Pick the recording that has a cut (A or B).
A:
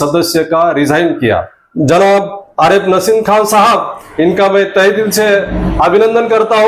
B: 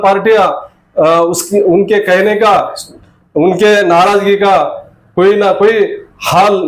A